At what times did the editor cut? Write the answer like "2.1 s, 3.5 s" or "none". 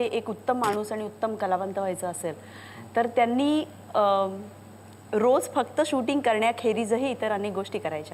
none